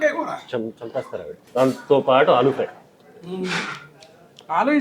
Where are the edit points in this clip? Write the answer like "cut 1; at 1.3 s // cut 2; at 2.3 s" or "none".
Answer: cut 1; at 1.4 s